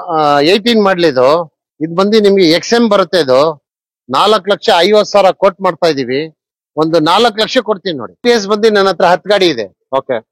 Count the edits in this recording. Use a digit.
1